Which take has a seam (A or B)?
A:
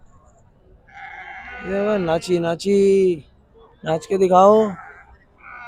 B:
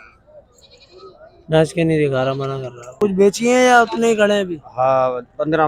B